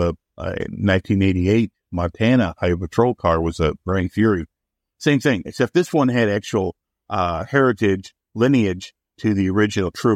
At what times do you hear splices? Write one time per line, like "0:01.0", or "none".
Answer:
none

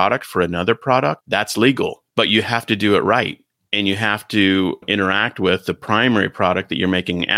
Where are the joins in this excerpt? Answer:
0:01.2
0:02.0

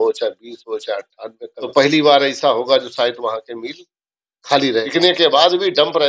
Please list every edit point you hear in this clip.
0:01.5
0:04.8

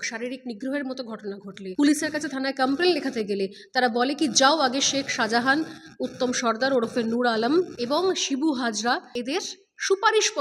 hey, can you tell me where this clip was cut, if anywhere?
0:01.6
0:07.8
0:09.1

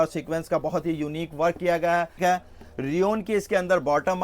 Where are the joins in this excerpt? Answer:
0:02.2

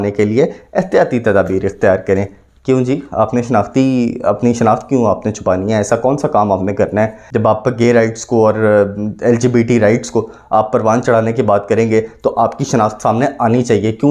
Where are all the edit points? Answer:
0:07.2

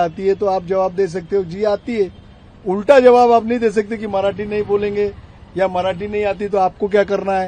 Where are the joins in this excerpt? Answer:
none

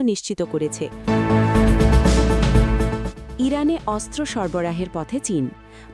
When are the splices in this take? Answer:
0:01.0
0:03.2

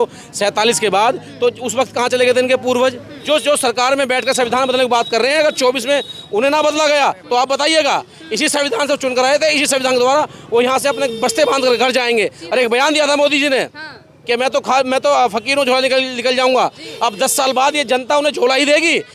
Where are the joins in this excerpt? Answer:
0:03.1

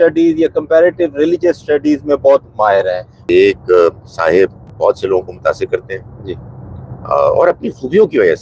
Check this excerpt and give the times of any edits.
0:03.1

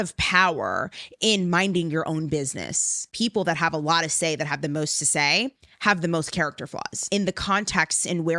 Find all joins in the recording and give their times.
0:03.1
0:07.1

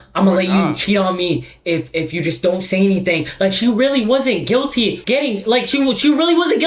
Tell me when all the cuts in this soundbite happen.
0:05.0

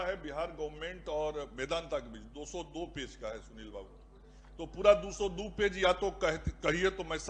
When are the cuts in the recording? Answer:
none

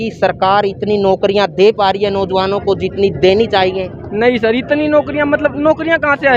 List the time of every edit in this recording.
none

